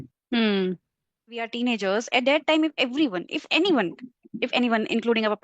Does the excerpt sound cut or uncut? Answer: cut